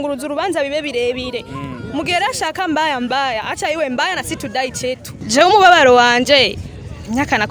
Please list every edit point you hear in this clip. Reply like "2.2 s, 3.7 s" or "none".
5.2 s

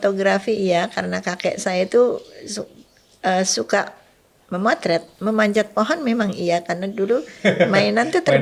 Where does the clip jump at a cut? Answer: 5.1 s

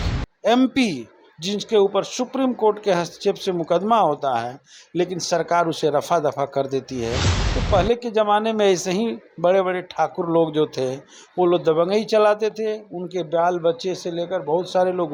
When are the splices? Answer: none

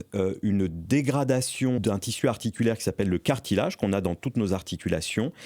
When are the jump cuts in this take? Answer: 1.8 s

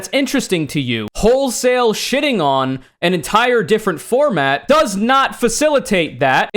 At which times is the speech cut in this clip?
none

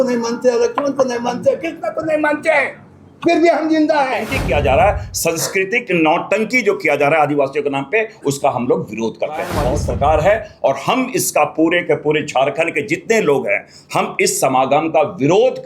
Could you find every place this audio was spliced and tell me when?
4.3 s, 9.6 s

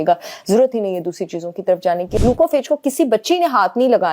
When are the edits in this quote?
2.2 s

